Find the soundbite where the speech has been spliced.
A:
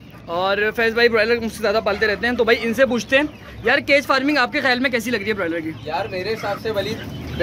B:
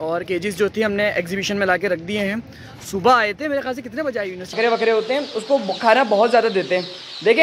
B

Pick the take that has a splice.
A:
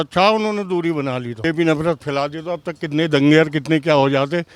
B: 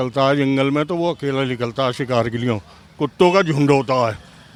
A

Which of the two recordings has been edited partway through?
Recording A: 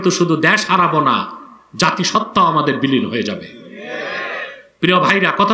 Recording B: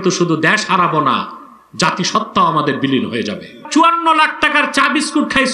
B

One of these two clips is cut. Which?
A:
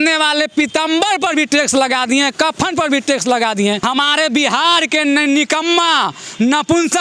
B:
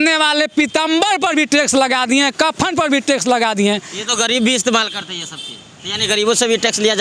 A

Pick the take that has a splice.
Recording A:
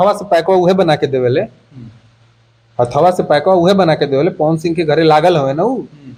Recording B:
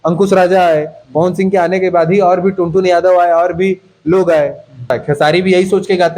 B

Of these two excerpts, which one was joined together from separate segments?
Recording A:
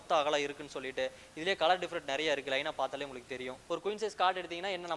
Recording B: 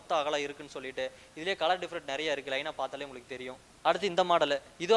A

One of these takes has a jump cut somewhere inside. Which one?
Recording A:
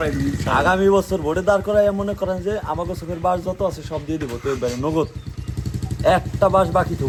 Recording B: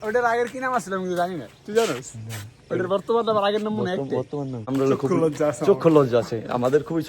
B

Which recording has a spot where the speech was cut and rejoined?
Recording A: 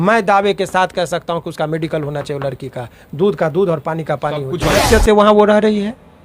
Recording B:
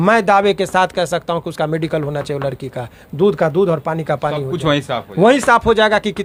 A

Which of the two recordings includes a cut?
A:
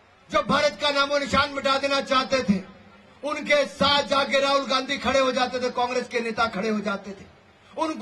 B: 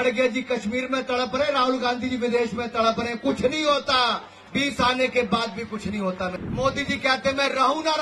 B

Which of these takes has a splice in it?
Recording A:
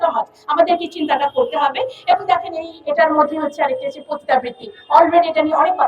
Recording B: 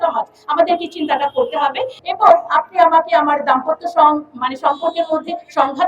B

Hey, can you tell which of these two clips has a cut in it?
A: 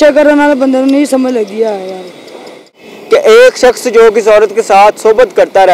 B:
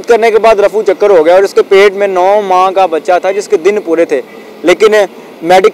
A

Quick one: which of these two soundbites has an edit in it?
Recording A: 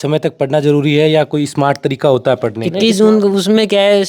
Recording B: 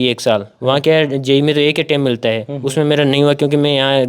A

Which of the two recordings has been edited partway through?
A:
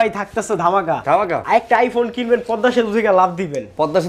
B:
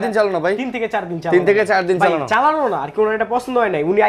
A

